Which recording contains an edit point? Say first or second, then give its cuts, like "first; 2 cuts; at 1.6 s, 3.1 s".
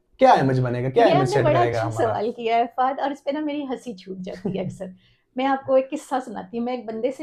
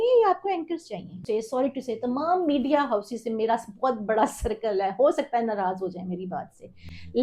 second; 1 cut; at 1.2 s